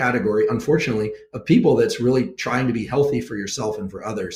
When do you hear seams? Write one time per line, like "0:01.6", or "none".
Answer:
none